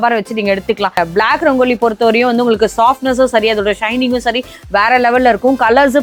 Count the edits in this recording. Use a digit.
1